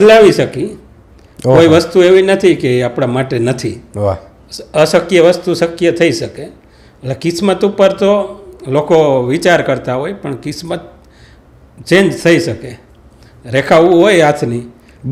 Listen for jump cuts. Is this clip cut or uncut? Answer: uncut